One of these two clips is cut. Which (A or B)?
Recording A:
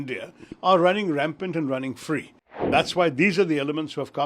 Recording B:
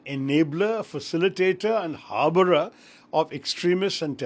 A